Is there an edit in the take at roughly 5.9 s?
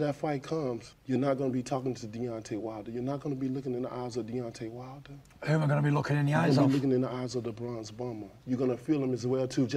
no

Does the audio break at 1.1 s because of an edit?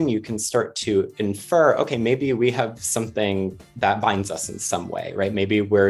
no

